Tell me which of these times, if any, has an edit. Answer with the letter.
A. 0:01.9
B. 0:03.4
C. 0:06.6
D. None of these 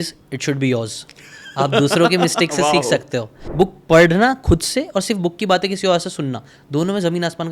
B